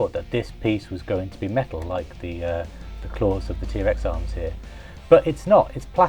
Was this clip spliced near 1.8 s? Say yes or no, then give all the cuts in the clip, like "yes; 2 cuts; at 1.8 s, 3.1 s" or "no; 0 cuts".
no; 0 cuts